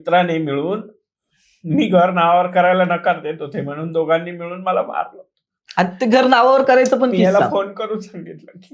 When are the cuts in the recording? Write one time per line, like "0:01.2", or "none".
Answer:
none